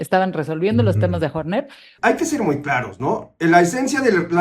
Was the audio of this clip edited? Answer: yes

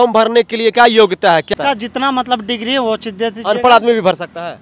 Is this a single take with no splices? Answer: no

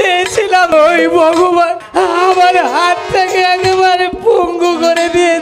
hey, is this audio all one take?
no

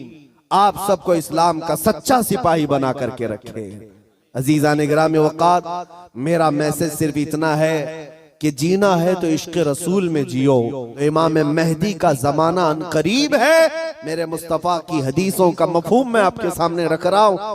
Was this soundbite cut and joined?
yes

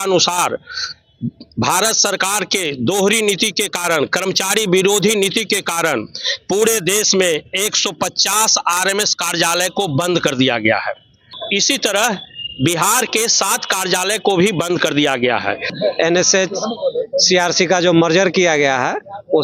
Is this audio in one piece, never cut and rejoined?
no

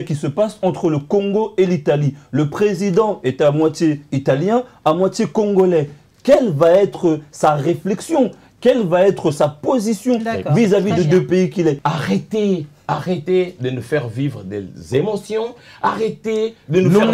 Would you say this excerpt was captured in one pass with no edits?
no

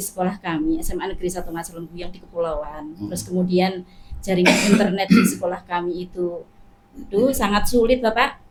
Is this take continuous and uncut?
yes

